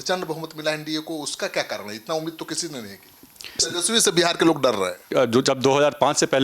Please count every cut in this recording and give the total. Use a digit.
2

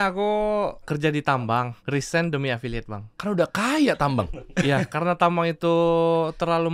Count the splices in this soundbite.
3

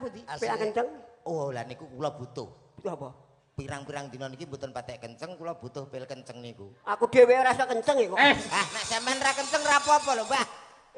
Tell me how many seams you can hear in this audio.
0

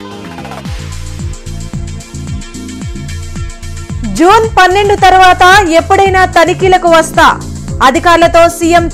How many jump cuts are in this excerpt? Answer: 1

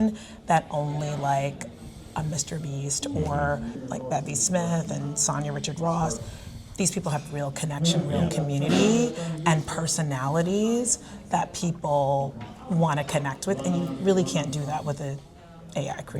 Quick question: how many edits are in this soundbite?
1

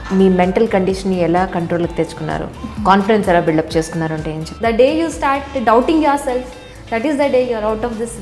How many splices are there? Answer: 1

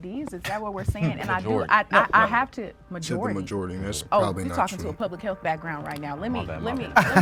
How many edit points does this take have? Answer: 0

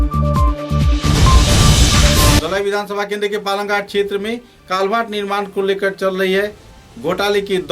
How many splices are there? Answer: 1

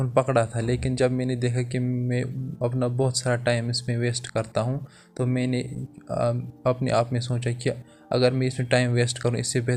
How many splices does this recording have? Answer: 0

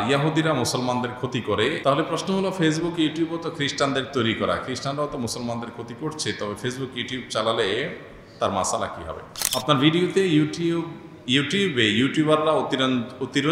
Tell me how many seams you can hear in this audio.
1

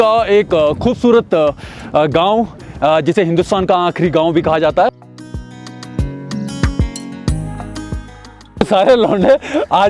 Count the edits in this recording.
2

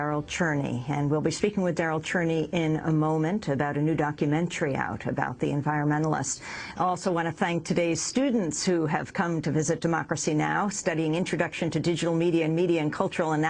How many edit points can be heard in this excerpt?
1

